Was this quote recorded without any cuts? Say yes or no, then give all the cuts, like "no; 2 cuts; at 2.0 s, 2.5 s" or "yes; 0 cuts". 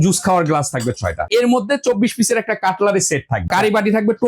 no; 2 cuts; at 1.3 s, 3.5 s